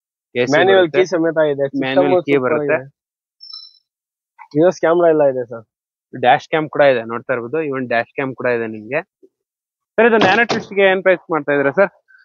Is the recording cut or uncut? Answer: uncut